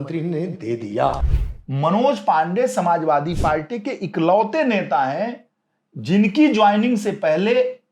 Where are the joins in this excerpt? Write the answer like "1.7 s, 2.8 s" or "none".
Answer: 1.2 s

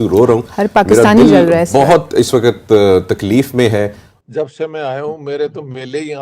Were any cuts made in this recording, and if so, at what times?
4.1 s

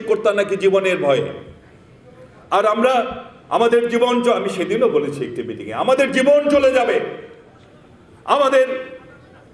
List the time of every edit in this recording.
none

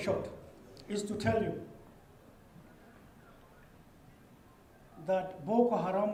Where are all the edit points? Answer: none

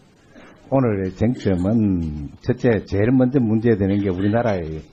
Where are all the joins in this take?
none

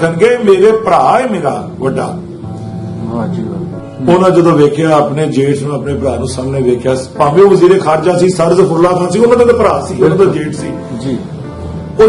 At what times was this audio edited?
3.8 s

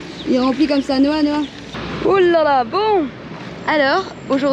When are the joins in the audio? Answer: none

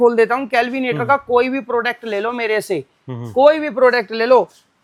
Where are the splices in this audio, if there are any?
none

